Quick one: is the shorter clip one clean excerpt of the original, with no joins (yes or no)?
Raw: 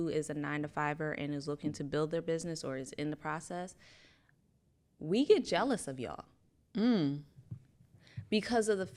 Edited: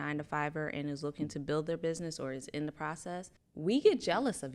no